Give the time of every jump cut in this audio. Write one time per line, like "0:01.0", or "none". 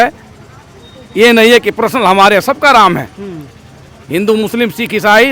none